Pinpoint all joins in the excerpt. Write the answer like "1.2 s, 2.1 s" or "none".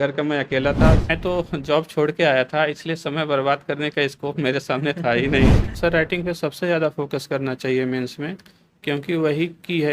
1.1 s, 5.8 s